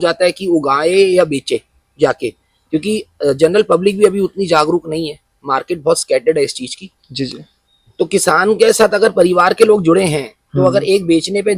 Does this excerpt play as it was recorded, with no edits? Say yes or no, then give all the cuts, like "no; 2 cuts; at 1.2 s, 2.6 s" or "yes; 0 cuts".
yes; 0 cuts